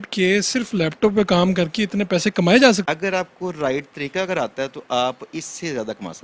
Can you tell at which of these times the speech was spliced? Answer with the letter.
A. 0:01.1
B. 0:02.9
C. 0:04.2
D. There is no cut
B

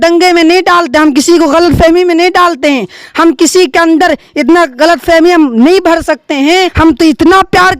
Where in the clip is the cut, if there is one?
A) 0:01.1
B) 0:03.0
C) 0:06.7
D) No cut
C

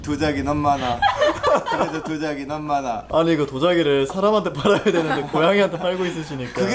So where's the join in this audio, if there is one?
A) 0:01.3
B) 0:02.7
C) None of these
C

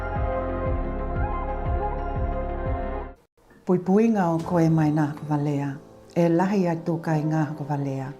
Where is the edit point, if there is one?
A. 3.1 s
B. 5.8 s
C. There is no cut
A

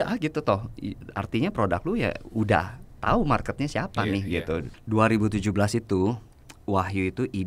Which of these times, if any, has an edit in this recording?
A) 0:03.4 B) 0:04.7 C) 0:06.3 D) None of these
B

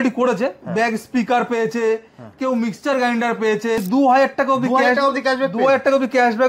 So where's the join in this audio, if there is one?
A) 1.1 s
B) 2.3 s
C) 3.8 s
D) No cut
C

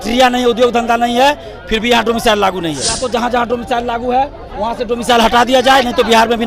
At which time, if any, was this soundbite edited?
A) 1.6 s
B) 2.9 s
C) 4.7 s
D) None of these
B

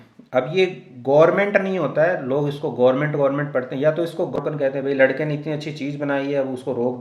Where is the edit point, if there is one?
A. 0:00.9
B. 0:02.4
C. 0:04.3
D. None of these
C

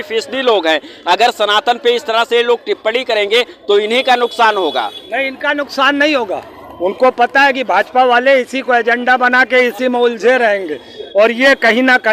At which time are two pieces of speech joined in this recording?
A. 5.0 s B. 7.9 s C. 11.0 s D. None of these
D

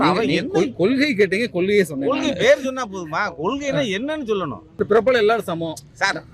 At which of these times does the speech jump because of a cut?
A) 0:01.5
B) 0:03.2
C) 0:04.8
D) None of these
C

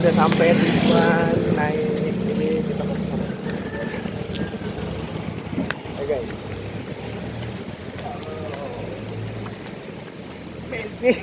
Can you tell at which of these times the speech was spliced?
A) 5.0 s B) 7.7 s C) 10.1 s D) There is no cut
D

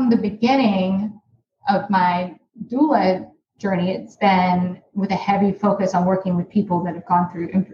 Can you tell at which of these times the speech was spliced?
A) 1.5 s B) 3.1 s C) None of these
C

